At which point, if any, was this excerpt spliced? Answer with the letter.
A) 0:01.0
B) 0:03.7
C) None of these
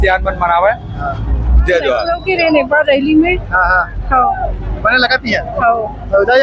C